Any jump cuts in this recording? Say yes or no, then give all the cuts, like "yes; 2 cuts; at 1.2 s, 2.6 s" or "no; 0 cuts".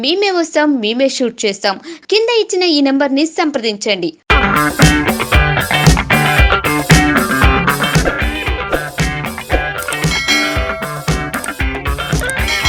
no; 0 cuts